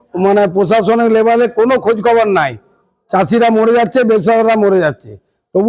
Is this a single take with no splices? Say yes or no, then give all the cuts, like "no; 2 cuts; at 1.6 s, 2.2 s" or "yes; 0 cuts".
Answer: yes; 0 cuts